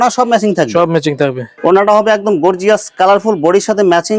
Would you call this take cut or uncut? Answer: cut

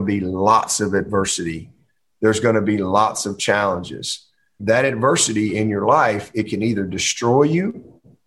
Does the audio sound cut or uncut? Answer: cut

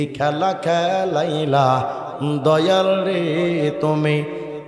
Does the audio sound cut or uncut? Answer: uncut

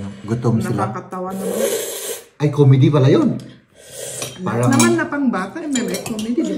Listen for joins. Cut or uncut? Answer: uncut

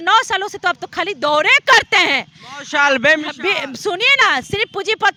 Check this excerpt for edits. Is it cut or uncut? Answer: uncut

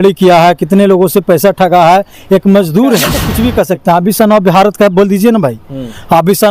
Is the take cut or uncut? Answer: cut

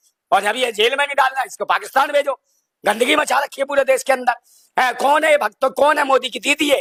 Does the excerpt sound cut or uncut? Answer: uncut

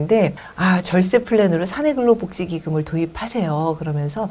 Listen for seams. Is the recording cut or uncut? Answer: uncut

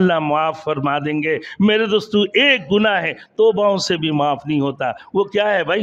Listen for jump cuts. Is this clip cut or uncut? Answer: uncut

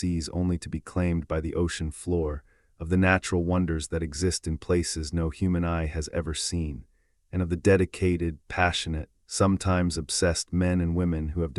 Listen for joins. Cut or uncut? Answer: uncut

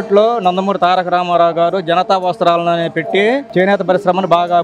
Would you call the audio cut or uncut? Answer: uncut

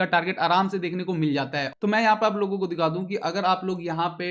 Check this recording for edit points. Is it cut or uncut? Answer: cut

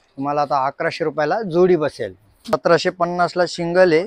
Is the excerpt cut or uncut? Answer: cut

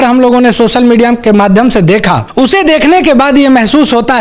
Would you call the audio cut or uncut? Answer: cut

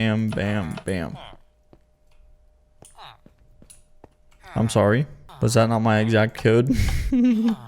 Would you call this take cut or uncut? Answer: cut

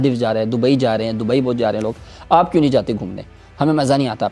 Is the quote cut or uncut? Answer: uncut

